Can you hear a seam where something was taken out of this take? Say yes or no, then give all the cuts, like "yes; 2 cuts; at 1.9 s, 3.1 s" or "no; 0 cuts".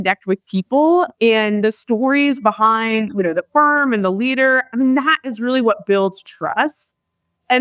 no; 0 cuts